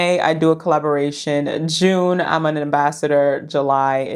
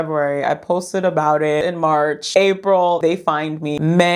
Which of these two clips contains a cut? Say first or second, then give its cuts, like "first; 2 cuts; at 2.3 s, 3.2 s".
second; 2 cuts; at 1.6 s, 3.1 s